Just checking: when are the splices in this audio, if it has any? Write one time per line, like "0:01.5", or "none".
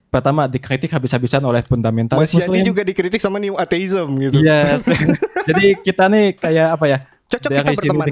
none